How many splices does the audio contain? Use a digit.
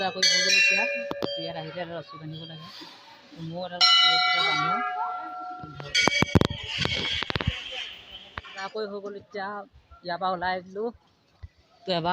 2